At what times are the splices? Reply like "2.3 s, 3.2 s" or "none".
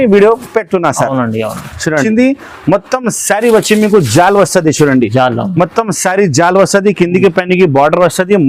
2.1 s